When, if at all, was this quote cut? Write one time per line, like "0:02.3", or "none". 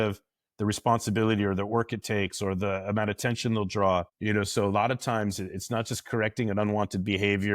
0:04.1